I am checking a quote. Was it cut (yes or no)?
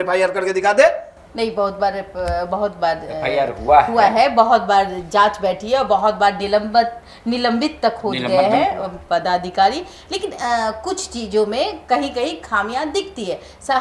no